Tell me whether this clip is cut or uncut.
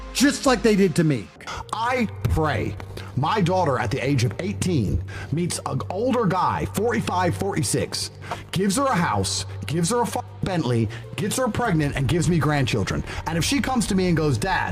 cut